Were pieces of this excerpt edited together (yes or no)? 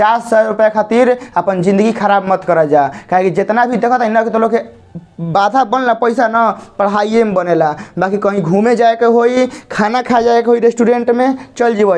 no